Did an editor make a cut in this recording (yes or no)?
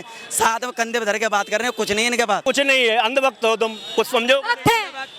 yes